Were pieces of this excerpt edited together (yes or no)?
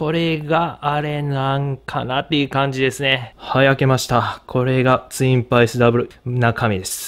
yes